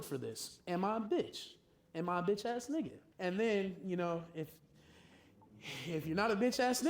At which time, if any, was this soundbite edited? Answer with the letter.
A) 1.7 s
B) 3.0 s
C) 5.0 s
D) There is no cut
B